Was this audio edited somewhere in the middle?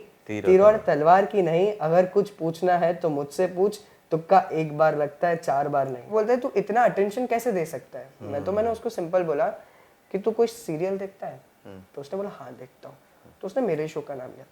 yes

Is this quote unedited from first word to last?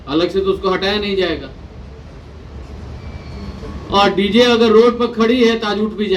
yes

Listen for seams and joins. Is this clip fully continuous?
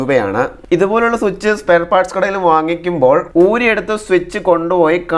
yes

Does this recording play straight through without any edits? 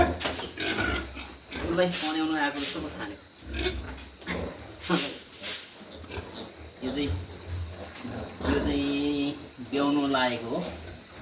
yes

